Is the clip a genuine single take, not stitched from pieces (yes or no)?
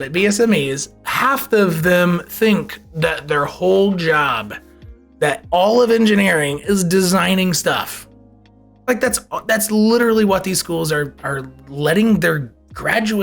yes